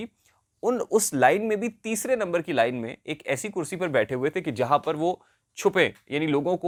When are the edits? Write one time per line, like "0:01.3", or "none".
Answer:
none

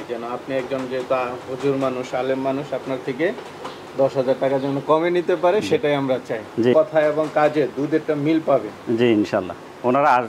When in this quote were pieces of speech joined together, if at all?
0:06.7

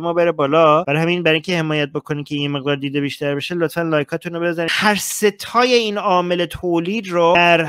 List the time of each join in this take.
0:04.7

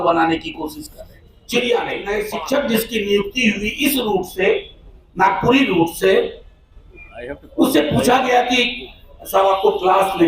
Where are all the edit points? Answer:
0:02.1

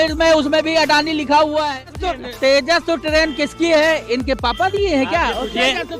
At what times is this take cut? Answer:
0:02.2

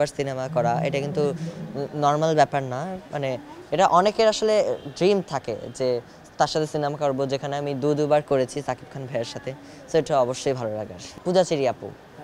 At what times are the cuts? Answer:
none

